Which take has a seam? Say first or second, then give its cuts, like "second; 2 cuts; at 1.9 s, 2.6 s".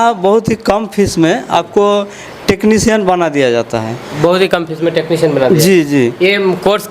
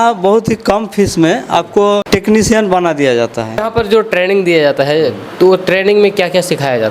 second; 2 cuts; at 2.0 s, 3.6 s